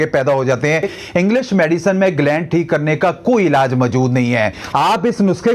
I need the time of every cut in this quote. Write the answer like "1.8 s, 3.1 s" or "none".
0.9 s, 4.6 s